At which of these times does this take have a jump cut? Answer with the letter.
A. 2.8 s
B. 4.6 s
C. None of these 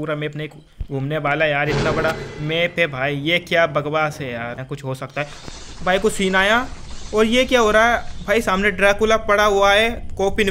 B